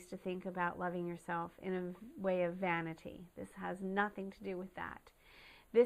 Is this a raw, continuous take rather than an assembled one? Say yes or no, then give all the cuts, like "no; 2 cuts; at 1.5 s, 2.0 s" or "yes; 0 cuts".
no; 1 cut; at 4.7 s